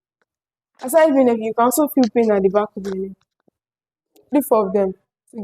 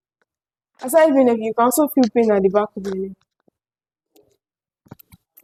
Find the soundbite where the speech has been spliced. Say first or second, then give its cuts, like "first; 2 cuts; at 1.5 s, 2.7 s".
first; 1 cut; at 4.3 s